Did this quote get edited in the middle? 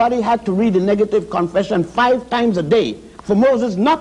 no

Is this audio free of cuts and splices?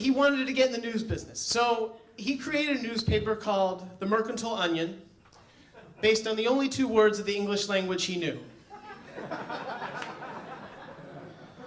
yes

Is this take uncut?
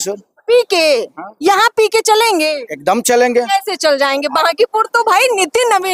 yes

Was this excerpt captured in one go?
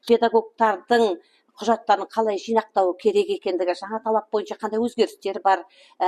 yes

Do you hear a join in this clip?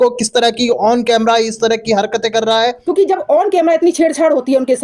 yes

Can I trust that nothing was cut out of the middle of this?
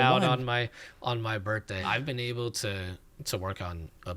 no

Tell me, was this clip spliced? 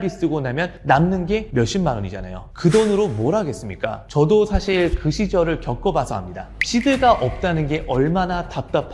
no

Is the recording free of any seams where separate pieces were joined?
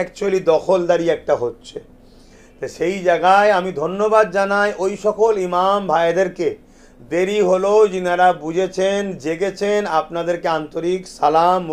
yes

